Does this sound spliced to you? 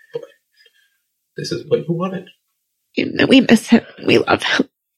yes; 1 cut; at 3.0 s

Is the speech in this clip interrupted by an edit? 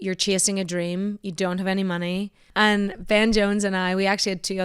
yes; 1 cut; at 2.4 s

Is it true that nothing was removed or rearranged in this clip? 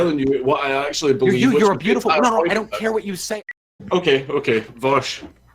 no; 1 cut; at 3.4 s

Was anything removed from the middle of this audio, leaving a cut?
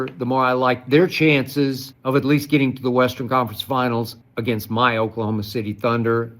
yes; 2 cuts; at 1.9 s, 4.2 s

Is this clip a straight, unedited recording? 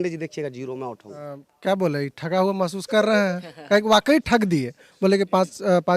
no; 1 cut; at 1.5 s

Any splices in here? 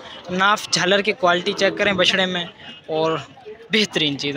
no; 0 cuts

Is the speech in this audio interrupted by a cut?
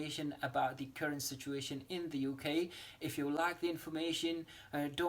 no; 0 cuts

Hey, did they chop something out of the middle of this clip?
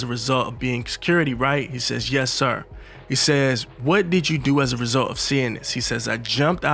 no; 0 cuts

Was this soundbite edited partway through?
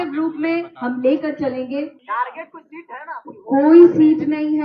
yes; 1 cut; at 2.0 s

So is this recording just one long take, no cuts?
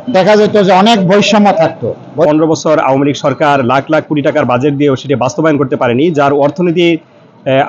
no; 1 cut; at 2.3 s

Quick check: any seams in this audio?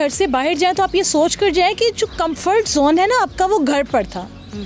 no; 0 cuts

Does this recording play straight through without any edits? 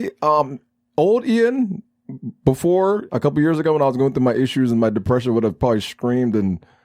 yes; 0 cuts

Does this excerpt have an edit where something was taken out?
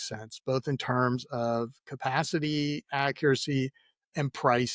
no; 0 cuts

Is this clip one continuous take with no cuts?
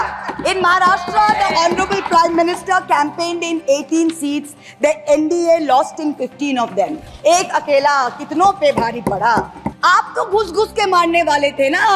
no; 1 cut; at 9.6 s

